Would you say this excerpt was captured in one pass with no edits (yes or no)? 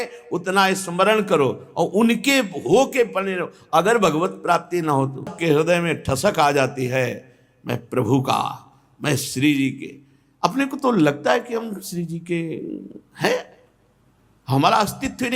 no